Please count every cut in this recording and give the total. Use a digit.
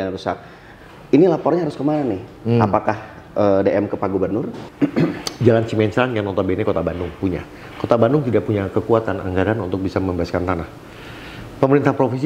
1